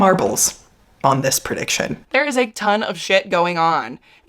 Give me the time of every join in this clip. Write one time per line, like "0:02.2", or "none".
0:02.0